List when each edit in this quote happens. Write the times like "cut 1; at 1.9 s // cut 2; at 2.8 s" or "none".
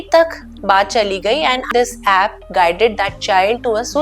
cut 1; at 1.7 s